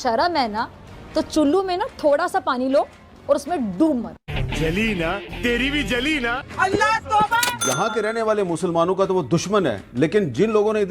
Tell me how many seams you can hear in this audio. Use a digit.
1